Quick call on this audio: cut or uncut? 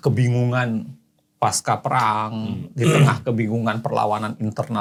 uncut